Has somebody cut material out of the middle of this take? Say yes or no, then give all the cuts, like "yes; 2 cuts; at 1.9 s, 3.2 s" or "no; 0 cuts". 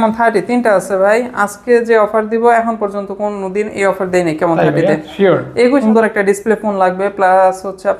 yes; 1 cut; at 5.8 s